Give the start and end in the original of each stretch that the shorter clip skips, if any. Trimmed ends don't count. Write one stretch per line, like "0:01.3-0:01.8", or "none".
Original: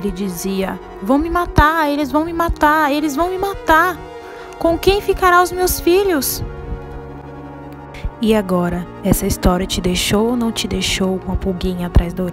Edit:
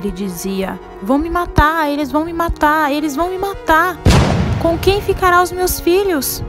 none